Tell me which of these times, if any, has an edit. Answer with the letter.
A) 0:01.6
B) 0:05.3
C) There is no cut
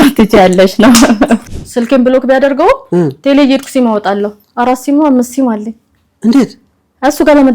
A